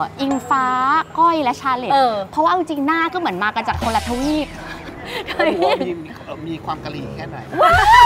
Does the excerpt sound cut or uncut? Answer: uncut